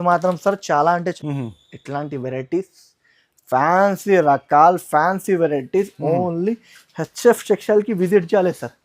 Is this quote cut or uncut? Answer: cut